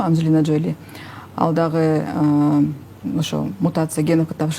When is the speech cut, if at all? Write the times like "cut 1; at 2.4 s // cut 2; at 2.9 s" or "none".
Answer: none

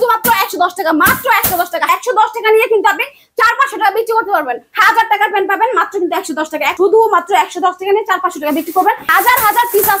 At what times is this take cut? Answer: cut 1; at 1.9 s // cut 2; at 4.6 s // cut 3; at 6.7 s // cut 4; at 9.1 s

